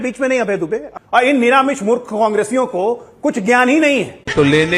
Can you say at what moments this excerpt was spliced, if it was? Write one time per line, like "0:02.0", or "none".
0:00.9